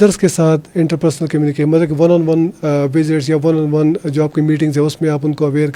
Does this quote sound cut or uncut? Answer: uncut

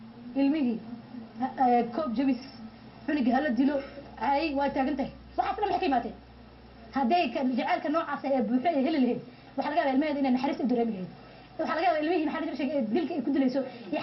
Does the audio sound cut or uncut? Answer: cut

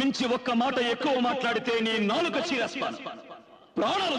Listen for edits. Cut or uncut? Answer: uncut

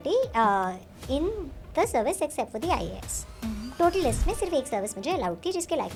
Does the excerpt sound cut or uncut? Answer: uncut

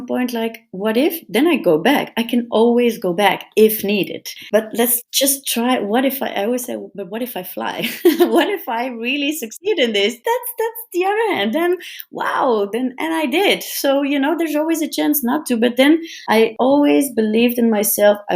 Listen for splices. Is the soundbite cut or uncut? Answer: uncut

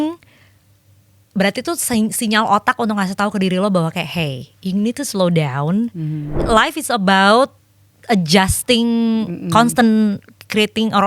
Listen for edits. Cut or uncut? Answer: cut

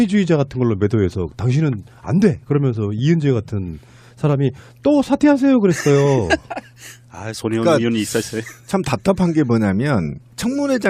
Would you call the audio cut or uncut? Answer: uncut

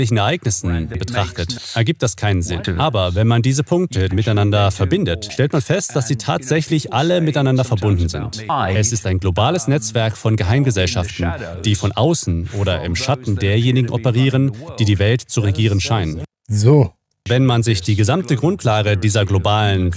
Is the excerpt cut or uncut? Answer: cut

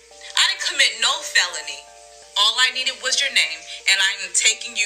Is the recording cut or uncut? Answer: cut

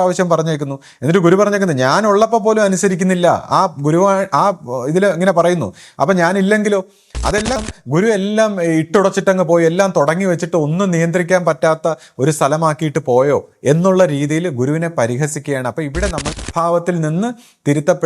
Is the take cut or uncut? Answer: cut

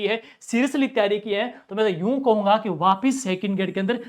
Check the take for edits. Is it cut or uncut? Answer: uncut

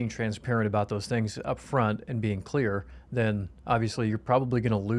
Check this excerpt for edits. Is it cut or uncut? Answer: uncut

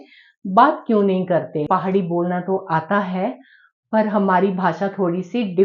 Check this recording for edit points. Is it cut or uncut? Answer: cut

